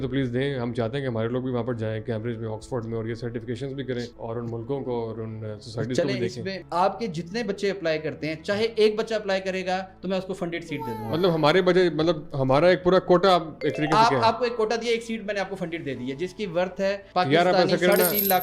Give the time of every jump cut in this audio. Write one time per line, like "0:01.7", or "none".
0:04.1
0:06.6